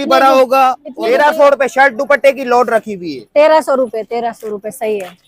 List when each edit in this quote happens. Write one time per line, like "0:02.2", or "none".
0:00.9

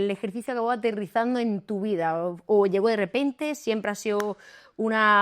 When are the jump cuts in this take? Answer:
none

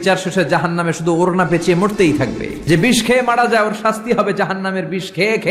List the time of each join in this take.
0:02.5

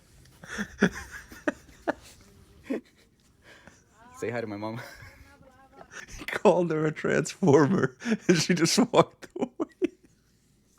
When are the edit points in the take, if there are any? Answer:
0:06.0

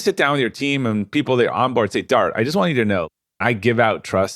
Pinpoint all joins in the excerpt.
0:03.2

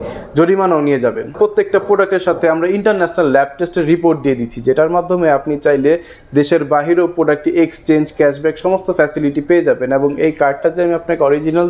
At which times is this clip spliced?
0:01.3

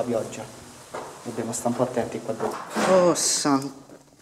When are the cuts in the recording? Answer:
0:02.6

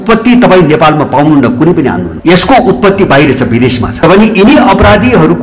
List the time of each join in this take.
0:04.0

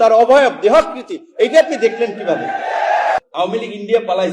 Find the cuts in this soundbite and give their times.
0:03.2

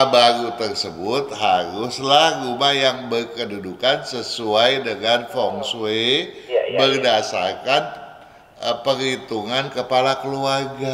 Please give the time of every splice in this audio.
none

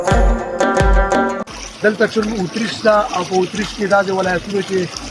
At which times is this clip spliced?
0:01.4

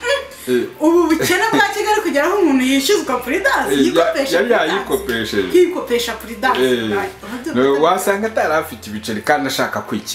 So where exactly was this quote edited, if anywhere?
none

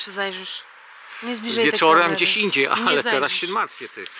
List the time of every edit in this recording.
none

